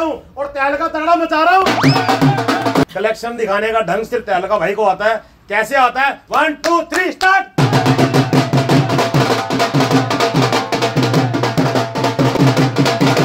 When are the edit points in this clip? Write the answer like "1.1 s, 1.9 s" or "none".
2.9 s, 12.3 s